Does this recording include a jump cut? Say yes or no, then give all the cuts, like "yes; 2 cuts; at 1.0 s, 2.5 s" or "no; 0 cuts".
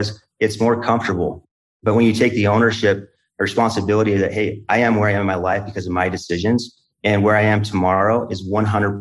yes; 1 cut; at 1.4 s